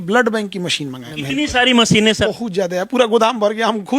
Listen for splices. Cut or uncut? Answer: cut